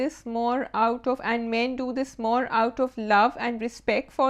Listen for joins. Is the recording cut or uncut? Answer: uncut